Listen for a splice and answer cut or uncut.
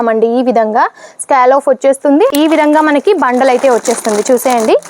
cut